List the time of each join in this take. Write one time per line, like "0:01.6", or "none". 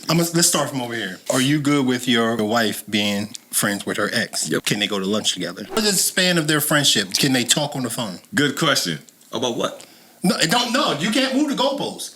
0:01.1
0:02.4
0:04.6
0:05.8